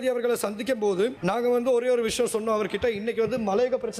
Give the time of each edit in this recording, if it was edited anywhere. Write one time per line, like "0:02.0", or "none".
0:01.2